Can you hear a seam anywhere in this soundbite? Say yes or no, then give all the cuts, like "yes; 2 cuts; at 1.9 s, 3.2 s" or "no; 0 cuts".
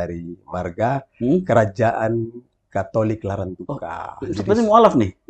no; 0 cuts